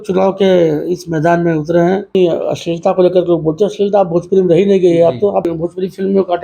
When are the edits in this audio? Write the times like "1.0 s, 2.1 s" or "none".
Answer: 2.1 s, 5.5 s